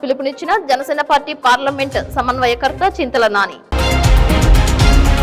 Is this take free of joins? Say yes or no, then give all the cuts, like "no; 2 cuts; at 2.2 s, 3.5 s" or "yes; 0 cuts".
no; 1 cut; at 3.6 s